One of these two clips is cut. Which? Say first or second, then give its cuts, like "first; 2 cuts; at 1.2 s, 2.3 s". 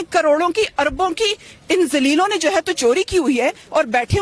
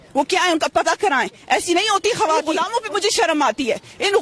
second; 1 cut; at 2.5 s